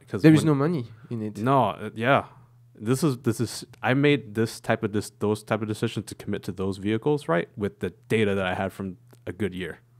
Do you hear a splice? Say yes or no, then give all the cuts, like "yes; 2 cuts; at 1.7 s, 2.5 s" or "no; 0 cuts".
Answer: no; 0 cuts